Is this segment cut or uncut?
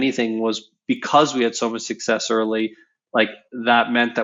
uncut